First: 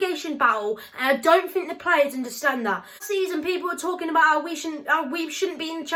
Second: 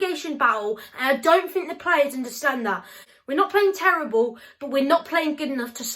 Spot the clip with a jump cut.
second; 1 cut; at 3.0 s

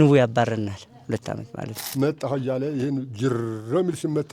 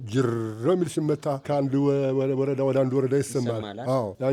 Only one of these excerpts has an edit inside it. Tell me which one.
first; 1 cut; at 1.9 s

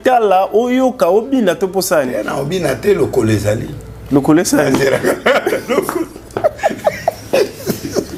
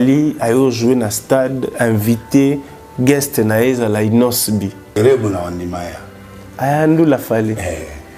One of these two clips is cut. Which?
second; 1 cut; at 5.0 s

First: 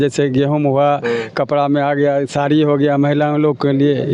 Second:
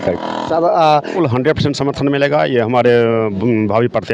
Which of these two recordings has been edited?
second; 1 cut; at 1.1 s

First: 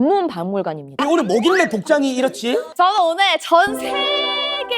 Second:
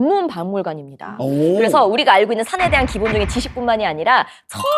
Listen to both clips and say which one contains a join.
first; 1 cut; at 1.0 s

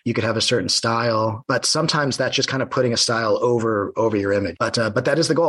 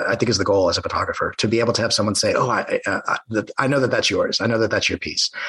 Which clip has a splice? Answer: first; 2 cuts; at 1.4 s, 4.5 s

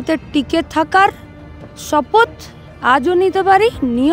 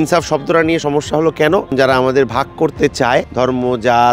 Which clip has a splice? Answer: second; 2 cuts; at 1.7 s, 3.3 s

